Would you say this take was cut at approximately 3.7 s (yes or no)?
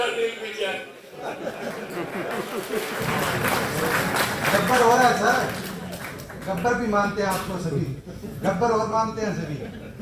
no